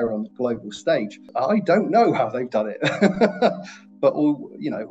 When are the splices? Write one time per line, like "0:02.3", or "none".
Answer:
0:01.3